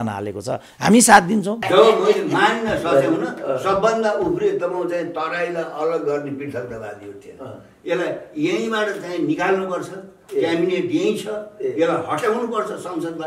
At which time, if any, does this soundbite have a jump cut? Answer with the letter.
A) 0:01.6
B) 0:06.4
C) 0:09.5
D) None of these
A